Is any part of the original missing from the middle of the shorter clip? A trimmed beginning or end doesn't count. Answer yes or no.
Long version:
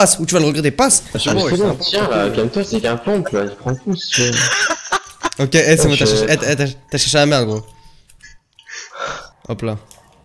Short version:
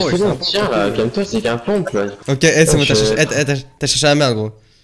yes